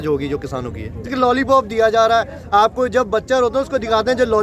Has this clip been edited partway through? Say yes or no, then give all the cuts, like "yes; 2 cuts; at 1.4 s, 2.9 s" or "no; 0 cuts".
yes; 1 cut; at 1.1 s